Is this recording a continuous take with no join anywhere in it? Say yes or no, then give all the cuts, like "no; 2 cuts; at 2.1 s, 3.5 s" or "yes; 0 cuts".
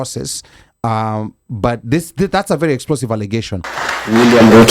no; 1 cut; at 3.7 s